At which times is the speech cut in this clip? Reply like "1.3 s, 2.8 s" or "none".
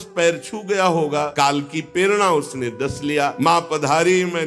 1.3 s, 3.3 s